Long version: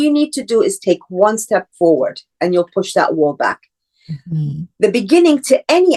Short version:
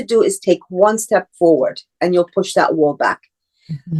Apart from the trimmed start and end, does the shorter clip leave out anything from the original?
no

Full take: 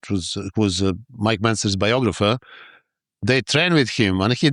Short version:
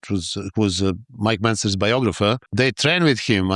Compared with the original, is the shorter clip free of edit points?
no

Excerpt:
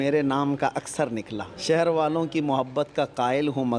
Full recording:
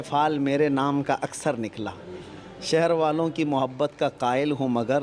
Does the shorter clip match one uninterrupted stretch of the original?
no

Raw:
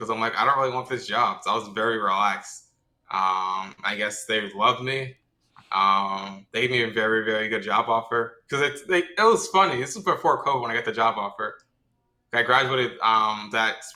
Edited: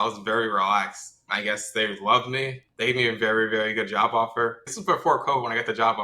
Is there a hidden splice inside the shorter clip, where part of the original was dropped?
yes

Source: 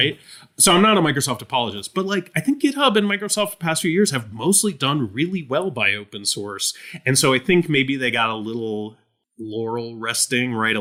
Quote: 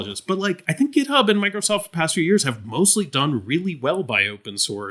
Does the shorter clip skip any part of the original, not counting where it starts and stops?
no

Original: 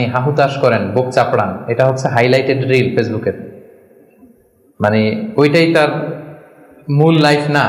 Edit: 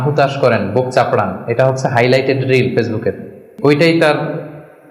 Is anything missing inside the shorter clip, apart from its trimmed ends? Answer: yes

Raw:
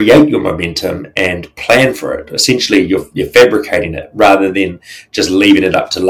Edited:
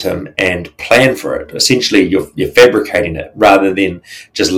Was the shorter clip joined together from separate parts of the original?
no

